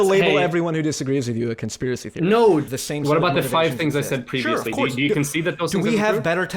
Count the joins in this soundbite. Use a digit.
1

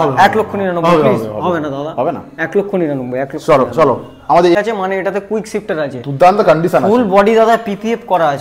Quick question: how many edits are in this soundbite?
1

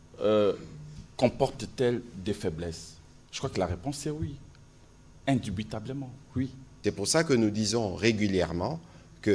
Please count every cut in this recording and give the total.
1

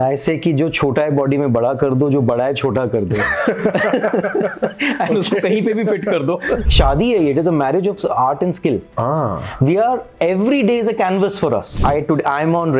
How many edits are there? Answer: 2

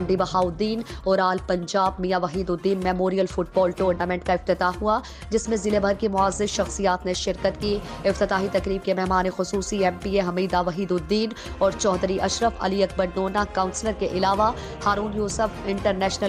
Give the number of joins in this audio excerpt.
0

